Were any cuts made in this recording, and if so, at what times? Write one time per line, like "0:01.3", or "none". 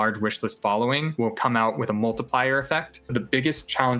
0:01.1
0:03.1